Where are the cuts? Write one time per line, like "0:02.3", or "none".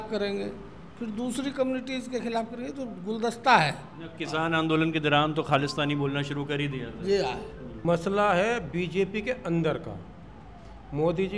0:07.8